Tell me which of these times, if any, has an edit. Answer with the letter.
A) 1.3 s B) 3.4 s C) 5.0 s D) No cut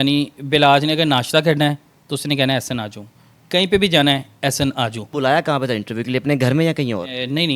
C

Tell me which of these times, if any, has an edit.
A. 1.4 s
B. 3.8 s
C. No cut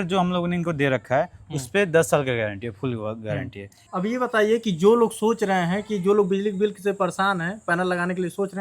B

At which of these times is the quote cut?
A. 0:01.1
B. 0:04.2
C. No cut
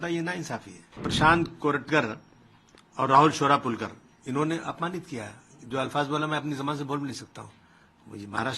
A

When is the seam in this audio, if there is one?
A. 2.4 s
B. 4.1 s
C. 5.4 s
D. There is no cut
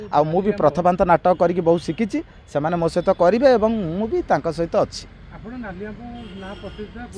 D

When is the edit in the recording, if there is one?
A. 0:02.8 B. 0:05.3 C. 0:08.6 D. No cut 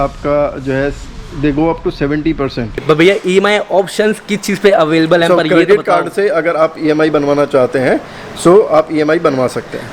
A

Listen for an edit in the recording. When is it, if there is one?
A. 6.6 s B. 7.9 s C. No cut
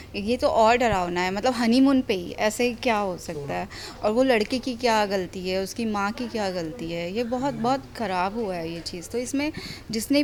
C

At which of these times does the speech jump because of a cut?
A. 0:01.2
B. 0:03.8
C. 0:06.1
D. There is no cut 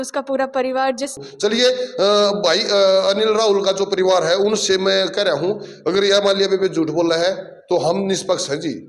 A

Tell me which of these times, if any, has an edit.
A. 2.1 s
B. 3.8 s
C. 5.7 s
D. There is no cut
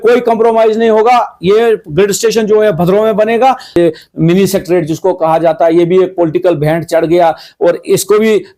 B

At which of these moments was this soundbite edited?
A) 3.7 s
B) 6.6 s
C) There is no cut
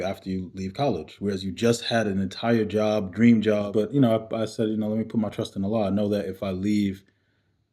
A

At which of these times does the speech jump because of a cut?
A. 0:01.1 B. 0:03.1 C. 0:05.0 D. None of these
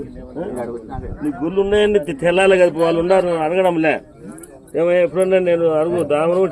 A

